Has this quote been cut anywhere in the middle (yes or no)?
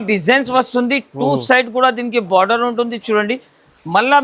no